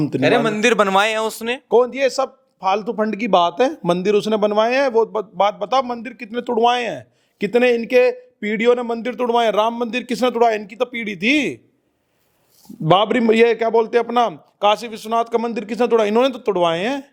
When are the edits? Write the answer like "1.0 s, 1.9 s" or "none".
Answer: none